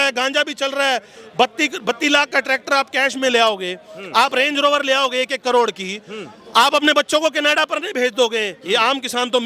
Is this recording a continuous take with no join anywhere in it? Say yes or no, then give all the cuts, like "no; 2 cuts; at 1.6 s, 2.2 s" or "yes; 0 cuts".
yes; 0 cuts